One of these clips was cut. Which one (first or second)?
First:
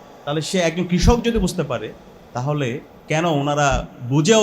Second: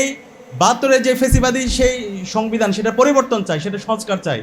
first